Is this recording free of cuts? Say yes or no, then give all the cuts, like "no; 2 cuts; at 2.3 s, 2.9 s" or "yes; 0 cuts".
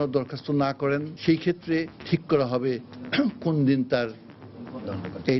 no; 2 cuts; at 1.1 s, 2.0 s